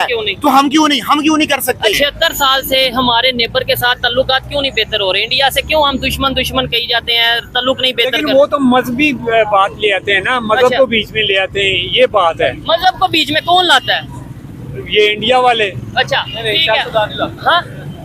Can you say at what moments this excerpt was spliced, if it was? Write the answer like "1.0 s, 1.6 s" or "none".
1.9 s